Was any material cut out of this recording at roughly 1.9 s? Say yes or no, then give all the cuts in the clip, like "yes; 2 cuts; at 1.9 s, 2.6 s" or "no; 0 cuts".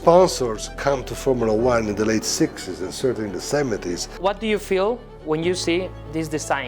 no; 2 cuts; at 4.1 s, 5.1 s